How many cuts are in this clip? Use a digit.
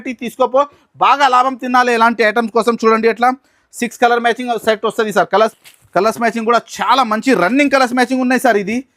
1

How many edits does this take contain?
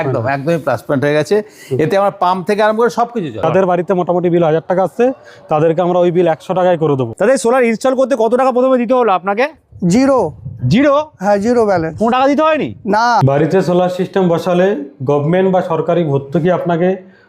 3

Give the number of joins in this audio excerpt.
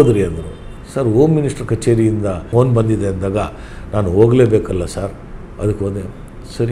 1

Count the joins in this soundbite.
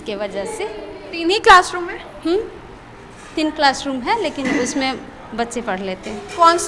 0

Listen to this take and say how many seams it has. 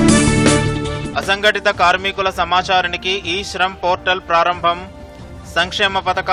0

